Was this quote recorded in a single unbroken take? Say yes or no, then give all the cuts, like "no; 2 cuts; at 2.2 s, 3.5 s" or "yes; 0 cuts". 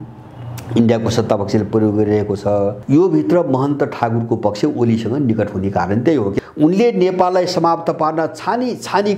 no; 2 cuts; at 2.8 s, 6.4 s